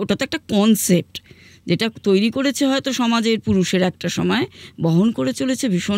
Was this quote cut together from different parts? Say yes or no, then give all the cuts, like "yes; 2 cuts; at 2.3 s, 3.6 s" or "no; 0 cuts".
no; 0 cuts